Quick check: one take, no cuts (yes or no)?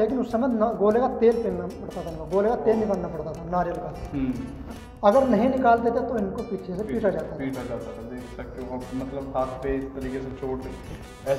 yes